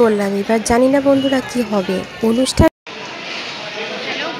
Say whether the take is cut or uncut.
cut